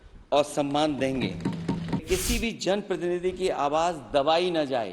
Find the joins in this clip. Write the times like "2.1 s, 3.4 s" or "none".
2.0 s